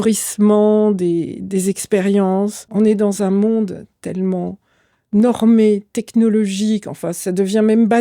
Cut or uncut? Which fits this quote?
cut